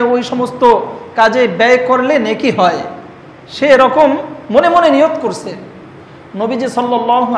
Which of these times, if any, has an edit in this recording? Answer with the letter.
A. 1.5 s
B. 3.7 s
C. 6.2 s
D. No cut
D